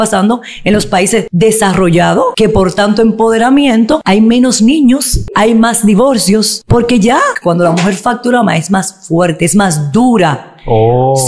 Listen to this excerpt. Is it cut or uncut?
cut